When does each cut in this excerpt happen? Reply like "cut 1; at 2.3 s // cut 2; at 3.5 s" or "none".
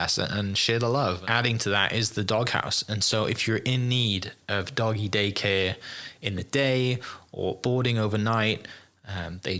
cut 1; at 1.2 s

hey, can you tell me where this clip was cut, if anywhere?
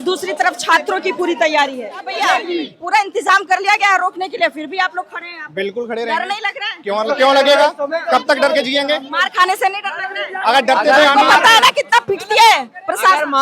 cut 1; at 2.2 s

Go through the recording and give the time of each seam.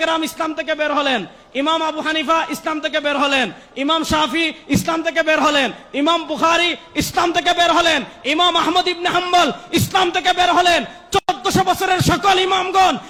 none

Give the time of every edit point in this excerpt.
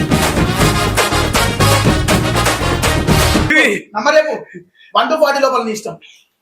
cut 1; at 3.5 s

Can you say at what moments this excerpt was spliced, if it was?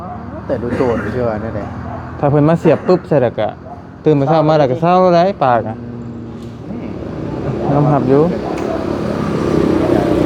none

